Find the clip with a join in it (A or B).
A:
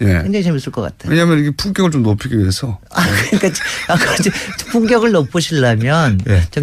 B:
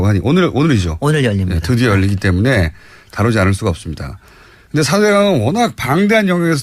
B